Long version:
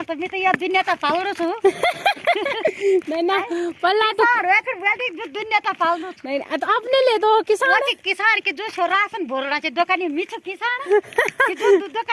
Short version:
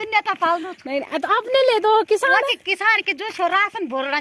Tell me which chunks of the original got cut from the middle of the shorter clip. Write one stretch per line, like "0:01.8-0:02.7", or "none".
none